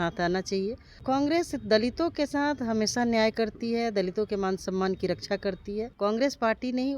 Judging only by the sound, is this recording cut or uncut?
cut